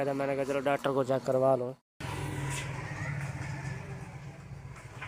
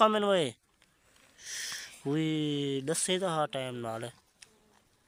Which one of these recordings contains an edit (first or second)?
first